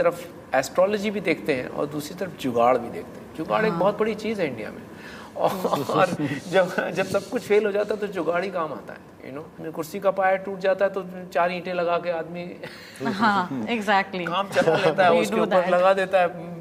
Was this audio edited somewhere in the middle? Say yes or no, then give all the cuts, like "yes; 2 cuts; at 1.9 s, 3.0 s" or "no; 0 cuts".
no; 0 cuts